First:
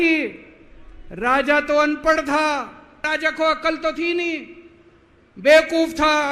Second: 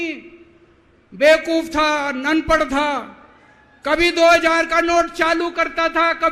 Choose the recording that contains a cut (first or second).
first